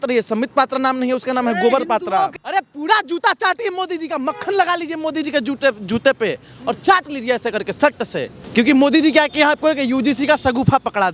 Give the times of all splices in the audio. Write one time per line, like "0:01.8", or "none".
0:02.3
0:08.4